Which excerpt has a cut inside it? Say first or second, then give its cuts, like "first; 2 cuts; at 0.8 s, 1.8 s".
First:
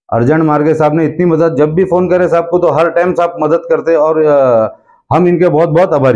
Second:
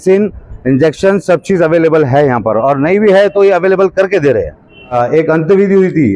second; 1 cut; at 4.9 s